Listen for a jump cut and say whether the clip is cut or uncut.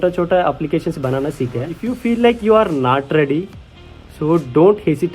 cut